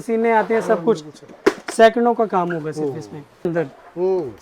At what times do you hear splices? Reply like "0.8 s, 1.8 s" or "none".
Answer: 3.5 s